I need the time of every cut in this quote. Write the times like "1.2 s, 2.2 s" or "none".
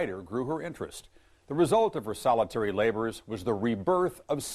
2.1 s